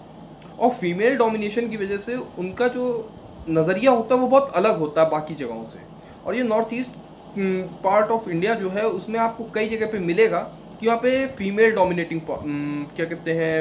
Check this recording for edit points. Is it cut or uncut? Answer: uncut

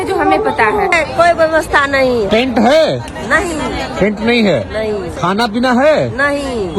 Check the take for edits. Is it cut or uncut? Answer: cut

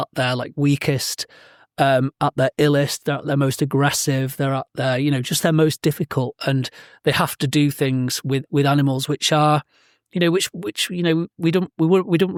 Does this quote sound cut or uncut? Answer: uncut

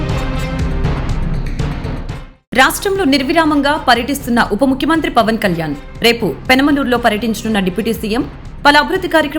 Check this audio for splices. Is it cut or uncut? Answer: cut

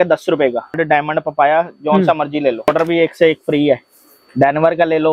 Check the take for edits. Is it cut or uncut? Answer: cut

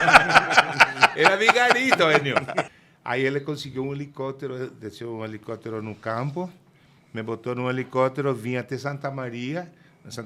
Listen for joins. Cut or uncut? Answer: cut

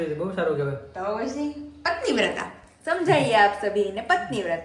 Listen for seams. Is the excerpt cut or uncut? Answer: uncut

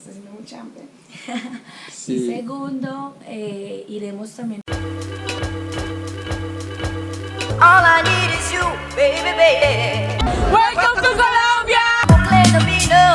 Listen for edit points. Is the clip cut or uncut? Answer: cut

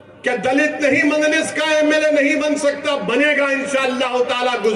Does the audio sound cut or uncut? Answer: uncut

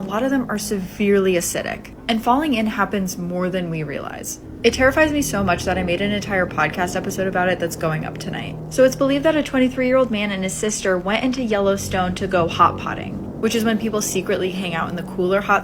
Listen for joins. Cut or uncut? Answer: uncut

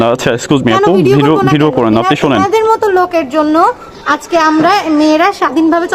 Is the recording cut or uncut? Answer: uncut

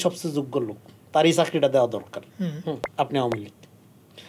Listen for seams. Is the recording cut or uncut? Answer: uncut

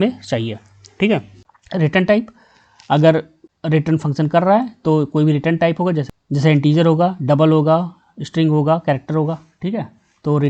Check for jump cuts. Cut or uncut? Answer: cut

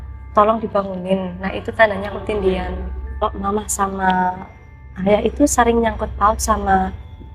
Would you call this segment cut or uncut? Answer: cut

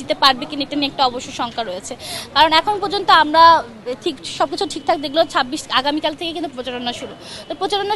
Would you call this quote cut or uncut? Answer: uncut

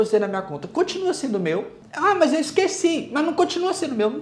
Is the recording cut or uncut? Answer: cut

